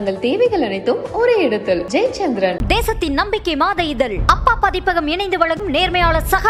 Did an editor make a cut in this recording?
no; 0 cuts

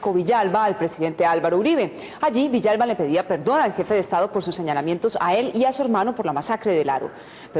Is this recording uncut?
yes; 0 cuts

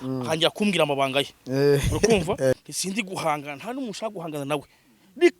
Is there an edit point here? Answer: yes; 1 cut; at 2.5 s

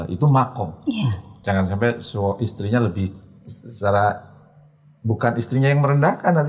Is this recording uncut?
yes; 0 cuts

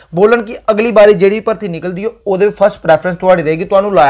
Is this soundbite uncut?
yes; 0 cuts

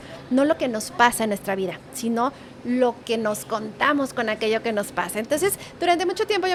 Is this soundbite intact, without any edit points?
yes; 0 cuts

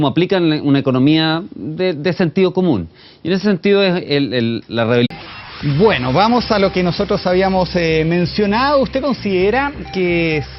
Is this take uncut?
yes; 0 cuts

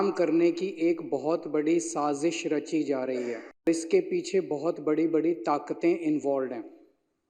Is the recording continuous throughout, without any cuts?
no; 1 cut; at 3.7 s

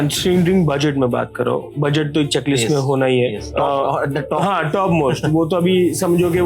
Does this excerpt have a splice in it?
yes; 1 cut; at 3.5 s

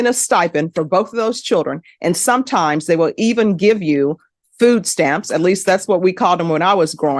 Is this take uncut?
yes; 0 cuts

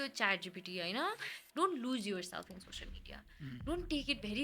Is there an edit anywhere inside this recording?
yes; 1 cut; at 1.4 s

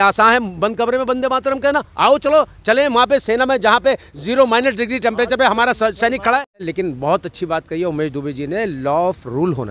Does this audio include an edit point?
yes; 1 cut; at 6.6 s

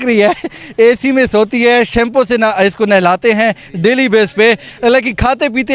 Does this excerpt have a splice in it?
no; 0 cuts

